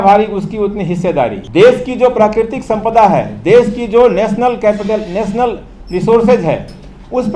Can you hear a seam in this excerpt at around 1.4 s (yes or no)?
yes